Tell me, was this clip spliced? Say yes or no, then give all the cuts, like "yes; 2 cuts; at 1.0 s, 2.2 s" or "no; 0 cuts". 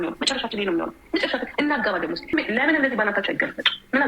yes; 1 cut; at 2.3 s